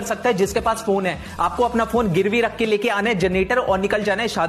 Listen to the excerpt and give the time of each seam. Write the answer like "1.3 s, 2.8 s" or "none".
none